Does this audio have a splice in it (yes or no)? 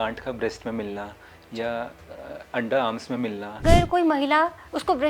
yes